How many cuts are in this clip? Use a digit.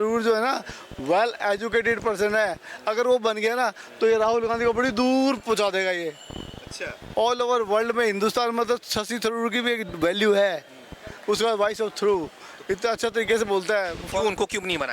0